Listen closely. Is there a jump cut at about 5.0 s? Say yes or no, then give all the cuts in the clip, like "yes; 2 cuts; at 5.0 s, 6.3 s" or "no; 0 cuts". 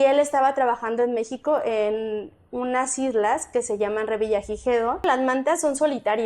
yes; 1 cut; at 5.0 s